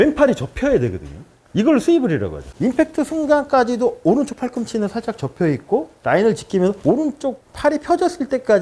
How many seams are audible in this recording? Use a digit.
1